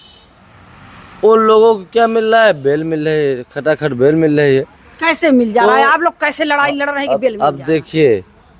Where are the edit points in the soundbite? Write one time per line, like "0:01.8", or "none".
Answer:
none